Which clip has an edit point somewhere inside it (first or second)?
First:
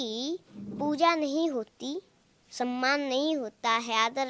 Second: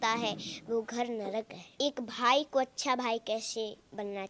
second